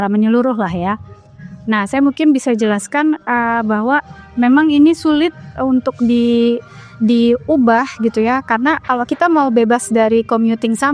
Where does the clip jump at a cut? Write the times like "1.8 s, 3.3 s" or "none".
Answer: none

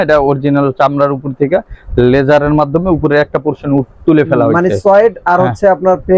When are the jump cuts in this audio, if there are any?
none

